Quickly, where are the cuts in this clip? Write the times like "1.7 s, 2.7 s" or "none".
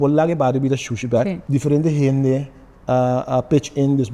1.4 s